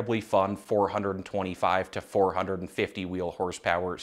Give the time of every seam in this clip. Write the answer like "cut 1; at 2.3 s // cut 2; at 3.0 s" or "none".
none